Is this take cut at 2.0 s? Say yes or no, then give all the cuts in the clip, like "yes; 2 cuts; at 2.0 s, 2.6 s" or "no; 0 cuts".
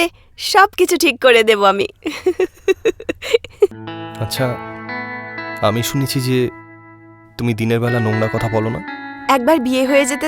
no; 1 cut; at 3.7 s